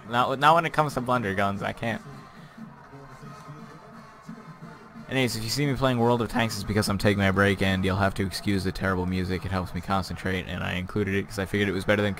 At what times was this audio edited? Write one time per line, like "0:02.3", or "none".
none